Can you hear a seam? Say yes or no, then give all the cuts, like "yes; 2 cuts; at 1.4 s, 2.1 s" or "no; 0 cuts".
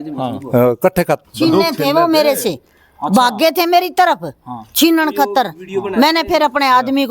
yes; 1 cut; at 1.2 s